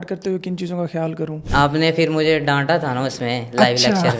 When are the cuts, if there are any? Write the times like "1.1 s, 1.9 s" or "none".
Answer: 1.4 s